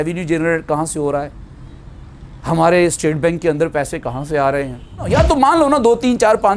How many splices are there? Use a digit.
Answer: 1